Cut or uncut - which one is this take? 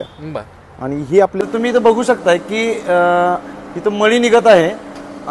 cut